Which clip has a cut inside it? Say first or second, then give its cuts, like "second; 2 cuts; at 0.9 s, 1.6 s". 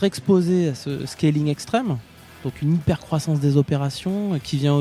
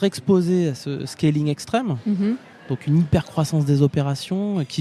first; 1 cut; at 2.1 s